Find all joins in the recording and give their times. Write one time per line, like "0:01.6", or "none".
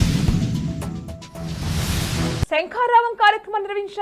0:02.5